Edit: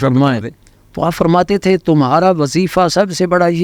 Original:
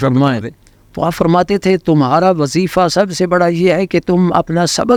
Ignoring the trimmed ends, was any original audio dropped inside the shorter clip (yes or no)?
no